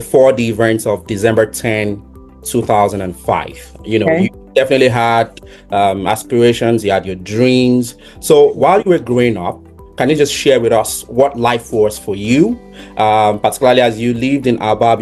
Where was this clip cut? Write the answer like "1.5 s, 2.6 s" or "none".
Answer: none